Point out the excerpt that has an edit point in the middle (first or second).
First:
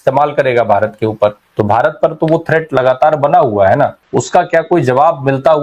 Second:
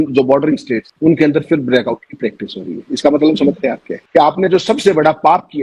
second